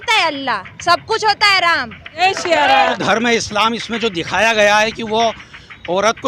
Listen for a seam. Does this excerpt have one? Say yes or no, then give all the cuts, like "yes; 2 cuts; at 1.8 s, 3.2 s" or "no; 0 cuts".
yes; 2 cuts; at 2.1 s, 3.0 s